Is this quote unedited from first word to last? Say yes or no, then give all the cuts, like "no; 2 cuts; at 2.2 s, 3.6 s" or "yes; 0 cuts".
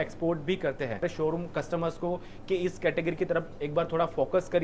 no; 1 cut; at 1.0 s